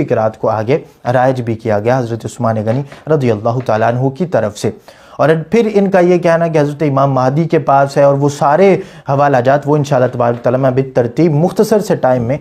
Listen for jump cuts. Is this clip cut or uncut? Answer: uncut